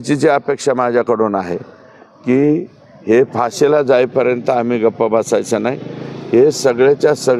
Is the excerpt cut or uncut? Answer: uncut